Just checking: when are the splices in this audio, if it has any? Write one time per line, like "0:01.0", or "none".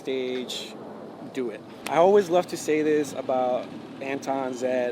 0:01.7

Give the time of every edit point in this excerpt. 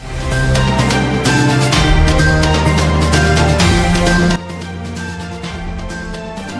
none

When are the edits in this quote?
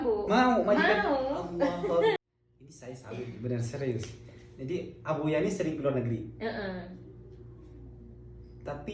0:02.2

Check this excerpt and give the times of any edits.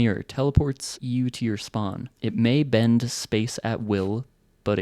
0:00.9
0:02.1

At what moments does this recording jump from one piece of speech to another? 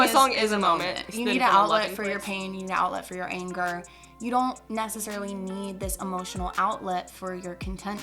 0:01.1

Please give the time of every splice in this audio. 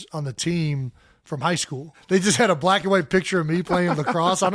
0:01.9

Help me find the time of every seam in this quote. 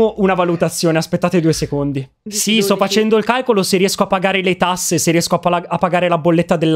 0:02.2

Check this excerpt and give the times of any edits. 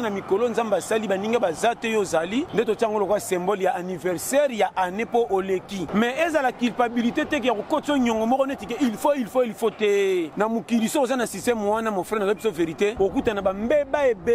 0:02.5
0:05.9
0:10.3
0:12.9

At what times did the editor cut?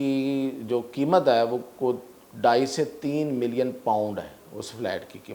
none

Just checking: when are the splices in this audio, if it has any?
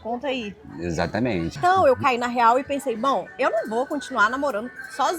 0:01.6

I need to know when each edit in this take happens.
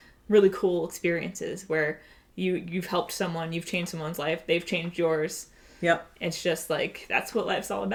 none

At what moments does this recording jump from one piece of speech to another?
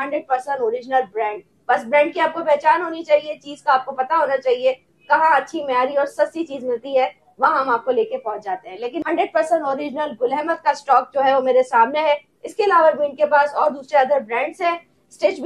0:08.9

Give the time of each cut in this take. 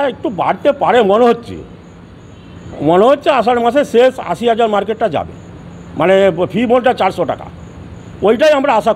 none

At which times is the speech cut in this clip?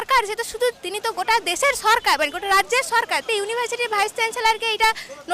0:03.3

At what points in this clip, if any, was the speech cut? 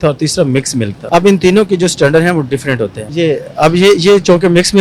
0:01.0
0:03.0

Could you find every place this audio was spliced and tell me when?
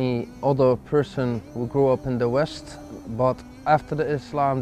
0:03.0

